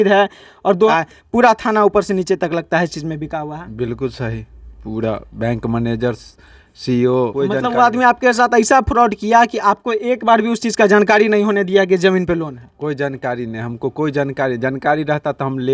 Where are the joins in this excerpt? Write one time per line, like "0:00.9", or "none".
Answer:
0:00.9
0:07.3